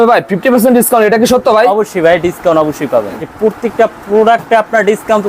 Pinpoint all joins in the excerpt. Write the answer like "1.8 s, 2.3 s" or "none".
3.3 s

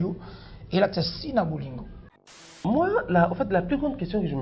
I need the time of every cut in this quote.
2.5 s

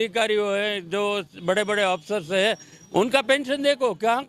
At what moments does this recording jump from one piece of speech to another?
none

